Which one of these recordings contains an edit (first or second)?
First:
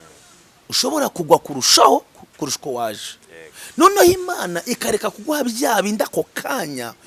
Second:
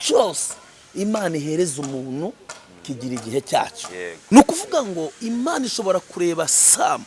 second